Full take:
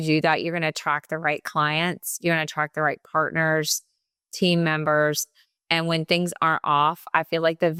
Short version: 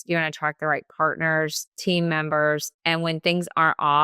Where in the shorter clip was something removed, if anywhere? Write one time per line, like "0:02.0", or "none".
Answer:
0:01.7
0:02.7